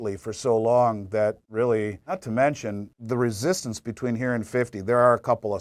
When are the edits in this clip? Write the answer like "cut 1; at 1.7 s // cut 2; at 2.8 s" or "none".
cut 1; at 2.0 s // cut 2; at 2.9 s